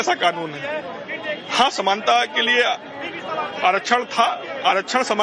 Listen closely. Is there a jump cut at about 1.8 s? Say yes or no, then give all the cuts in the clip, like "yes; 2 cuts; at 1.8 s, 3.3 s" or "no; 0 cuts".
no; 1 cut; at 3.5 s